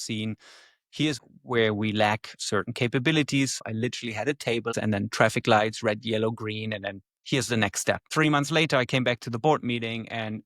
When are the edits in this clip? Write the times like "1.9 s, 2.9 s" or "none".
1.2 s, 3.6 s, 4.7 s, 8.1 s